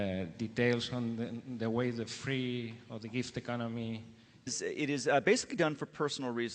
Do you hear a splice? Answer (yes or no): no